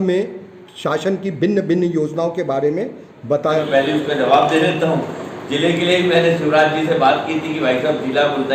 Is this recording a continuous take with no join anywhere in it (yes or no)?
no